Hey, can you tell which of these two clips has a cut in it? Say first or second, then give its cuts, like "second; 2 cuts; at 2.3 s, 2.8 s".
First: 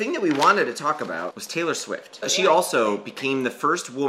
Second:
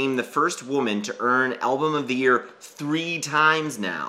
first; 1 cut; at 1.3 s